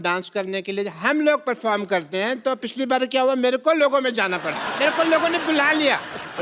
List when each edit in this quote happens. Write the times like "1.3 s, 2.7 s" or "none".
4.6 s